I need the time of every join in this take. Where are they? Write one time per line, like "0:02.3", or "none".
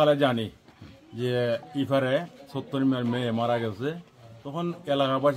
none